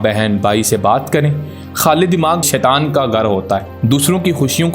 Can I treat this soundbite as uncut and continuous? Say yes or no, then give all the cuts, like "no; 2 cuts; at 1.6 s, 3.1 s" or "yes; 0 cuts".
no; 2 cuts; at 2.5 s, 3.7 s